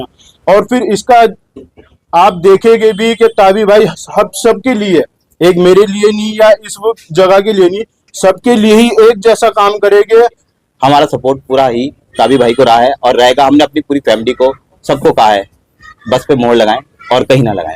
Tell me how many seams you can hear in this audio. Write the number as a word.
one